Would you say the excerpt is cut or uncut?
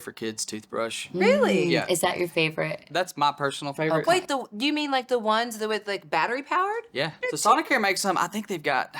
cut